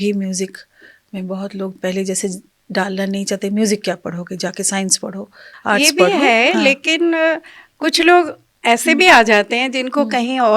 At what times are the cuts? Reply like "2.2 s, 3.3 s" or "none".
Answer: 5.4 s